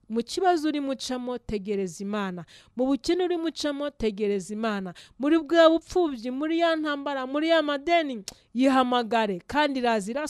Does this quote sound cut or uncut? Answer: uncut